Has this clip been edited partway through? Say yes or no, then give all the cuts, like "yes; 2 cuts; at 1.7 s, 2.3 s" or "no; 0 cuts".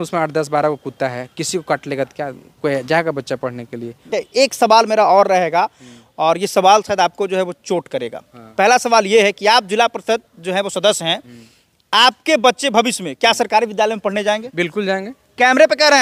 yes; 1 cut; at 4.1 s